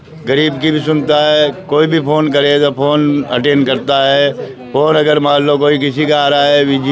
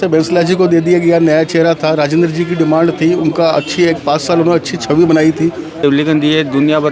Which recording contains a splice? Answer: second; 1 cut; at 5.8 s

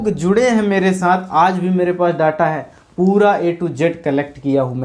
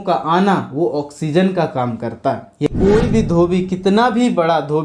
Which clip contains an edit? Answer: second; 1 cut; at 2.6 s

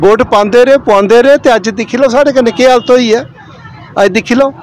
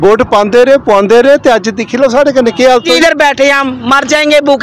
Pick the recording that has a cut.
second; 1 cut; at 2.9 s

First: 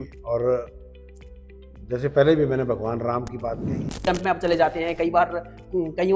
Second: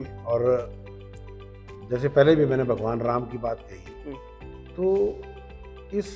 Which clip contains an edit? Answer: first; 1 cut; at 4.0 s

